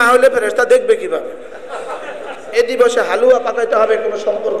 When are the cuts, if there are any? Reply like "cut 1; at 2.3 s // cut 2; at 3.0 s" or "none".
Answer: cut 1; at 2.4 s